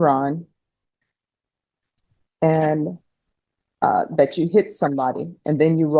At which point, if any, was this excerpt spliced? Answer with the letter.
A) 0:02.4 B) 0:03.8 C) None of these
C